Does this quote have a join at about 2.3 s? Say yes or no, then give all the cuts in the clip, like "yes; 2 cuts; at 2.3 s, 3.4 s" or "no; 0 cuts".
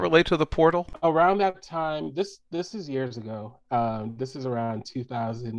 no; 1 cut; at 0.9 s